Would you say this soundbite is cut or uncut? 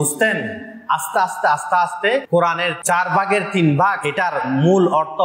cut